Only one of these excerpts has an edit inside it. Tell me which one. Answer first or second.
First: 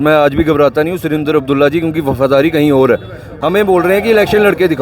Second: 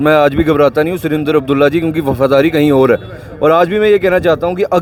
first